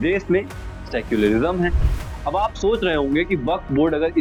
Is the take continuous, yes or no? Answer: yes